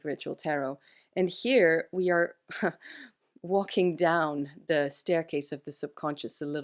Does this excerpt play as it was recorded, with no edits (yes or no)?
yes